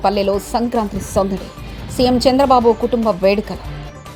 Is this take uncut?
yes; 0 cuts

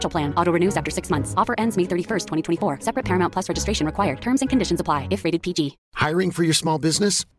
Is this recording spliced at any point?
yes; 1 cut; at 5.8 s

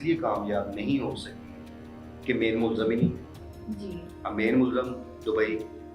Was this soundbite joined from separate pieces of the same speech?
no; 0 cuts

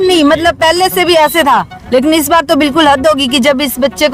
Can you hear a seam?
no; 0 cuts

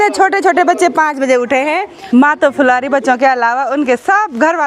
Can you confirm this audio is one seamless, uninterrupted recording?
no; 1 cut; at 2.0 s

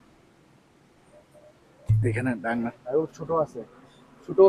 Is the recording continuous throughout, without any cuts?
no; 1 cut; at 2.8 s

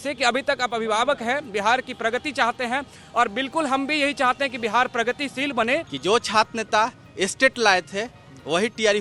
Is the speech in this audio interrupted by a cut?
yes; 1 cut; at 5.9 s

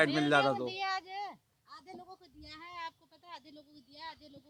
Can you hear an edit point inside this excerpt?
no; 0 cuts

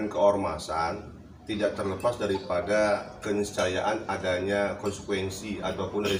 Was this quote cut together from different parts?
no; 0 cuts

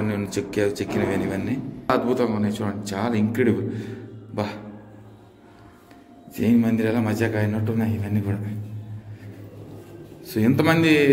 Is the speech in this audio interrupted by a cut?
yes; 1 cut; at 1.9 s

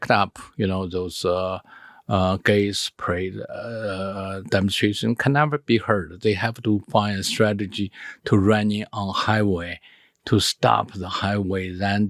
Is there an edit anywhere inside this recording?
no; 0 cuts

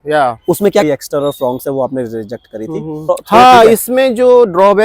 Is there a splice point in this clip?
yes; 2 cuts; at 0.8 s, 3.1 s

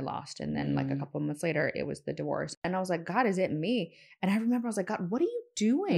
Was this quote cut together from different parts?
yes; 1 cut; at 2.6 s

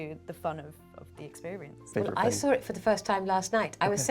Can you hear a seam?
yes; 1 cut; at 1.8 s

